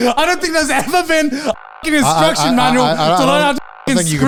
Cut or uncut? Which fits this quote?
uncut